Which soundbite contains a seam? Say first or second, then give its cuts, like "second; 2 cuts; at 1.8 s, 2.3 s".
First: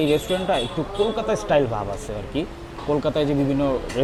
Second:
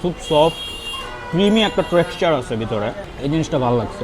second; 1 cut; at 3.1 s